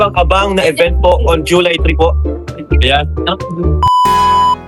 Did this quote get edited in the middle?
yes; 1 cut; at 3.7 s

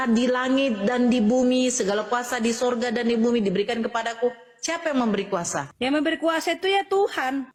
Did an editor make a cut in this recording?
no; 0 cuts

